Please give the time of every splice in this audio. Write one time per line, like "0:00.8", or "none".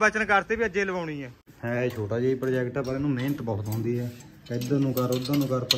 0:01.5